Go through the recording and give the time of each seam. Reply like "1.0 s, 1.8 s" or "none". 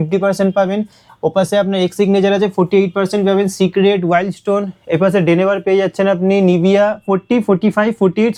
none